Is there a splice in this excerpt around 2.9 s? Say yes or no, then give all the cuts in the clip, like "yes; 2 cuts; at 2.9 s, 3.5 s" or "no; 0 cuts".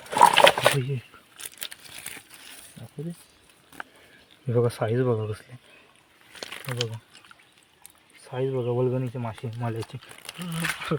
no; 0 cuts